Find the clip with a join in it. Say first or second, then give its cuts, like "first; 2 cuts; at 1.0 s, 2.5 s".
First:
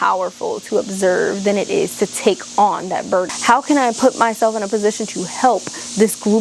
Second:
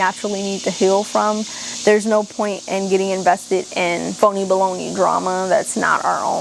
first; 1 cut; at 3.3 s